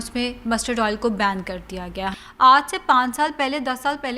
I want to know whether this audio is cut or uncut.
cut